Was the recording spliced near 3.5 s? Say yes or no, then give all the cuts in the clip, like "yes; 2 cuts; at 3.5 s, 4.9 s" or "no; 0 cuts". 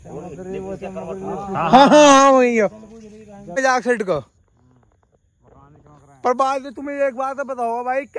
yes; 1 cut; at 3.5 s